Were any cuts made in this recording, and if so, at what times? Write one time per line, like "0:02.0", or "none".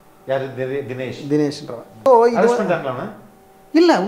0:02.1